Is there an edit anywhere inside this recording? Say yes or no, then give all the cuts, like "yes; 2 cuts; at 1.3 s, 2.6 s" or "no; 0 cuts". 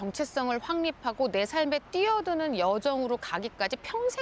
no; 0 cuts